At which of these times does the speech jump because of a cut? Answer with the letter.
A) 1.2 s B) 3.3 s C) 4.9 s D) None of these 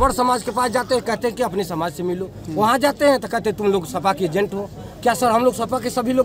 D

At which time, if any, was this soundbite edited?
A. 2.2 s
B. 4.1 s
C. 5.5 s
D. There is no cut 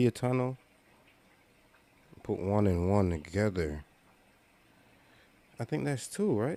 D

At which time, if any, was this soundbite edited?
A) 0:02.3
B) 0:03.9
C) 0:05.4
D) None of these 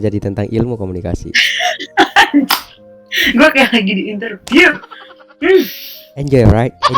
A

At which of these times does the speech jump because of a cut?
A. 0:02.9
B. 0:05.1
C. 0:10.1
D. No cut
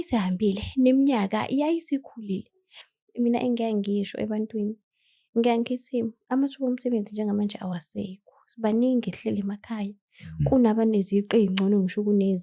A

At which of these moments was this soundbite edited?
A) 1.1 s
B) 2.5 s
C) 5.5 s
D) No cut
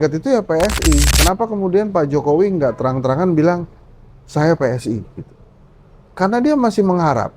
A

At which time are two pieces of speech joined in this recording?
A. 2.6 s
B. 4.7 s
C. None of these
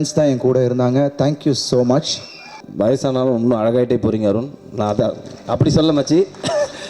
A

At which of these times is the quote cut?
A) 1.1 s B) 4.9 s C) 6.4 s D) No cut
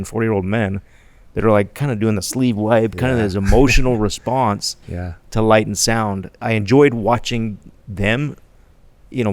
C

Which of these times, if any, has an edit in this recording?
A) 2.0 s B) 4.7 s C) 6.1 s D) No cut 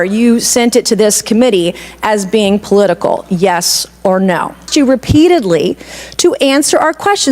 B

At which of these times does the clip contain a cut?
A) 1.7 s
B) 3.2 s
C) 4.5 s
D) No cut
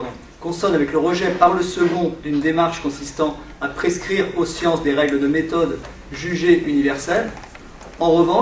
D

